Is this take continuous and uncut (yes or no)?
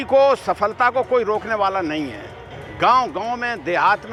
yes